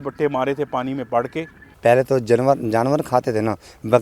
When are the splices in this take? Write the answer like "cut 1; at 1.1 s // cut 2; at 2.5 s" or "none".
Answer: cut 1; at 1.6 s